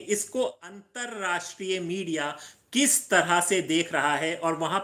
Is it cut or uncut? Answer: uncut